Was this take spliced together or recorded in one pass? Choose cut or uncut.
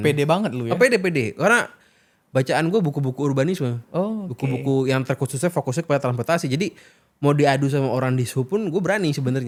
uncut